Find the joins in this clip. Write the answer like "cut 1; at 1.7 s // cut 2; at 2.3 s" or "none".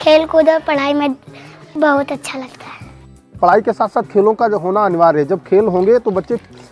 cut 1; at 1.7 s // cut 2; at 3.4 s